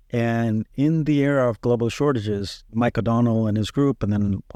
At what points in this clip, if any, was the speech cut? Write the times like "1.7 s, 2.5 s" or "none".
none